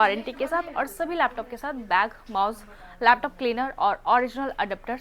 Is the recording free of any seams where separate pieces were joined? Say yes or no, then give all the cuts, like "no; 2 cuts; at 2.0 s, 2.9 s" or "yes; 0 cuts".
yes; 0 cuts